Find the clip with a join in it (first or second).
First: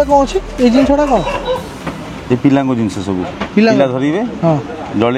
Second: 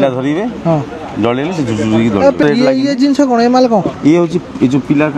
second